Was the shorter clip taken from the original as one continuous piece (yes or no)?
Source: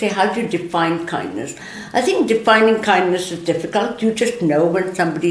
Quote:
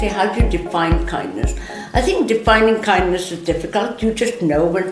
yes